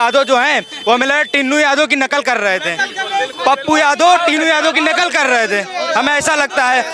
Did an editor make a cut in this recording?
no; 0 cuts

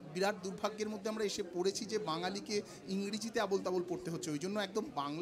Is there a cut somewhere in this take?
no; 0 cuts

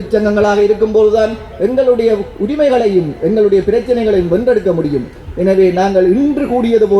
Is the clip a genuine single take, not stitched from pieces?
yes; 0 cuts

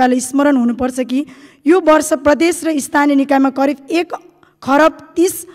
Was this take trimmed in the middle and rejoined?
no; 0 cuts

